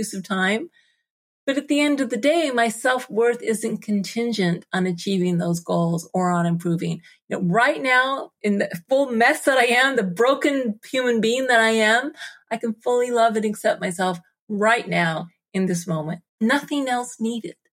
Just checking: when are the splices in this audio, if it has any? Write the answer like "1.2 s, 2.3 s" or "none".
8.4 s, 16.3 s